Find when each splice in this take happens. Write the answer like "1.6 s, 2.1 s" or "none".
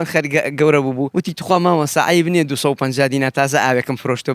1.1 s